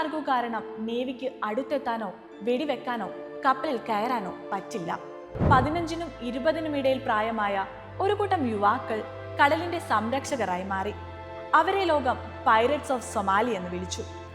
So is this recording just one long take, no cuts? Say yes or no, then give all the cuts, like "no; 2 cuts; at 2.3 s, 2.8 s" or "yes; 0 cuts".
no; 1 cut; at 5.4 s